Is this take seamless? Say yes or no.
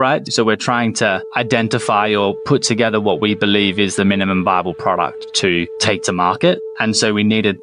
no